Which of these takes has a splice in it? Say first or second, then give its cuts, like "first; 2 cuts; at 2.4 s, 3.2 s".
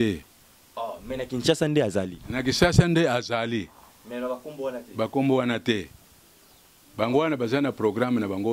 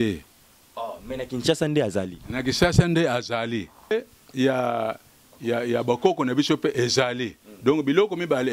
second; 1 cut; at 3.9 s